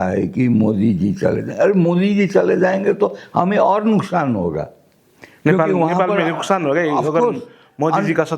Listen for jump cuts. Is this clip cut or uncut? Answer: uncut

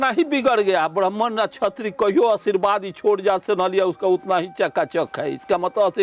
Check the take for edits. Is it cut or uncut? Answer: uncut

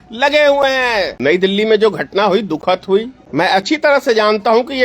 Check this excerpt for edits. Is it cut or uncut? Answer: cut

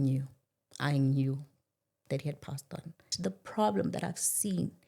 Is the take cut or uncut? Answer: cut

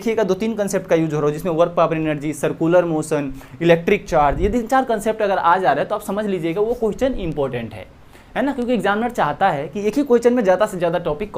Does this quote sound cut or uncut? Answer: uncut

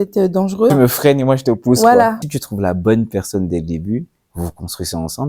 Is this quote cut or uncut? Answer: cut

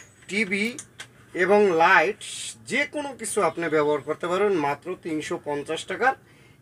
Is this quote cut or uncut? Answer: uncut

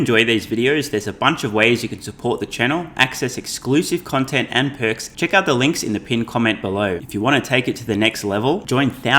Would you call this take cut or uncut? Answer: cut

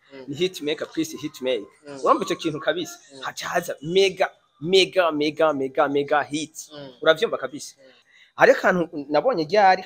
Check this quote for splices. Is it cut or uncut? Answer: cut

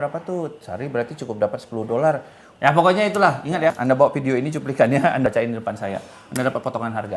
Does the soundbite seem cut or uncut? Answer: cut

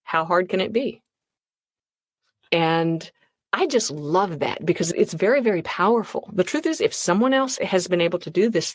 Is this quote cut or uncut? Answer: cut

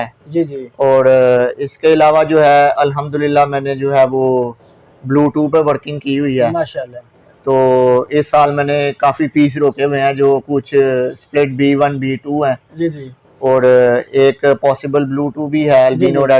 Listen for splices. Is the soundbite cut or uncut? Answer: uncut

